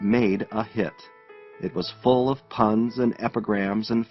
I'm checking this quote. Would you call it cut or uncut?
uncut